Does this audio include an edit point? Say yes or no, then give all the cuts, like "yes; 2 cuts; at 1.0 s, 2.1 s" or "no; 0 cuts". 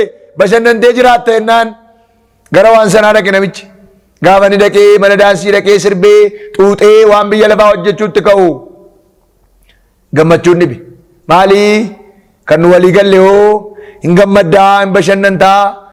no; 0 cuts